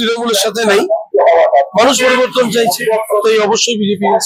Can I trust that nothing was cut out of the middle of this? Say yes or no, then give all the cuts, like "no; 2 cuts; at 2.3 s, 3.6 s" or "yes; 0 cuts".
yes; 0 cuts